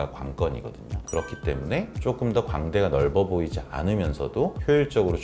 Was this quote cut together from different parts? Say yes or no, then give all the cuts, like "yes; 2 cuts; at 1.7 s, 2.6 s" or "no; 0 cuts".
yes; 1 cut; at 1.0 s